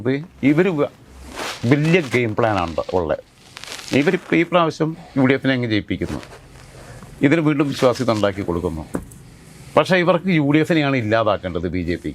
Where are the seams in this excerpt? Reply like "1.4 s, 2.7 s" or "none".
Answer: none